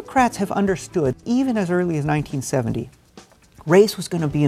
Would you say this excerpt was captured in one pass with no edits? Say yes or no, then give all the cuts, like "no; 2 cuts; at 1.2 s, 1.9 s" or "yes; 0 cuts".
no; 1 cut; at 1.1 s